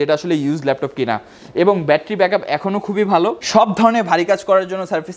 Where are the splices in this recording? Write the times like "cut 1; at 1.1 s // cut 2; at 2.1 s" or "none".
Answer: none